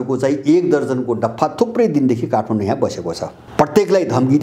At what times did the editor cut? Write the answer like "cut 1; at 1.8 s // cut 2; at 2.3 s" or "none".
cut 1; at 3.3 s